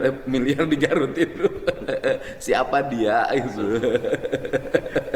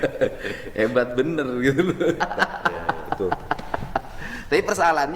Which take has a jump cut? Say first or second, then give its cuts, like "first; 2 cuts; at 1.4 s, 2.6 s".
second; 1 cut; at 2.2 s